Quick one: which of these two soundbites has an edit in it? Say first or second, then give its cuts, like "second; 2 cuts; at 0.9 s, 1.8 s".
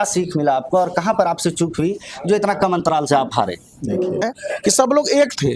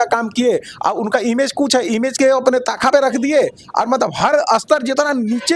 first; 1 cut; at 4.2 s